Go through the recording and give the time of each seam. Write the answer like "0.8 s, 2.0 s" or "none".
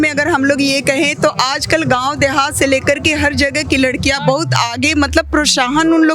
none